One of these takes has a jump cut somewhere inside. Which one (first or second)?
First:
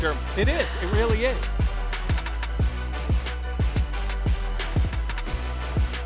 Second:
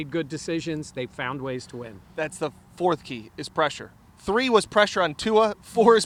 first